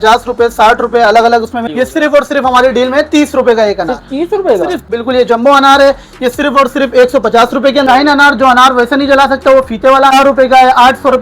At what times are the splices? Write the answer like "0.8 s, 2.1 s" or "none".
1.7 s, 4.9 s, 7.8 s, 10.1 s